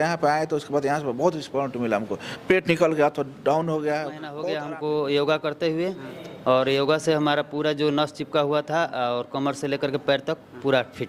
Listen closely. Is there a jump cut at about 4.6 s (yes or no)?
yes